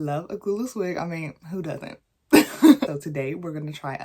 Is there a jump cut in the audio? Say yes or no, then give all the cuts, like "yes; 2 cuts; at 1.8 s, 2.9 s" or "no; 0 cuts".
yes; 1 cut; at 2.9 s